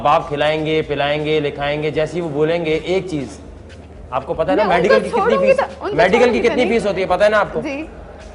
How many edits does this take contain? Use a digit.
1